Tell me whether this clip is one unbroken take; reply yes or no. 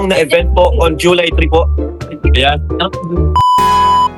no